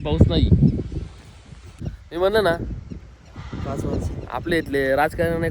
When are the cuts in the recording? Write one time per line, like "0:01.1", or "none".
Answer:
0:02.0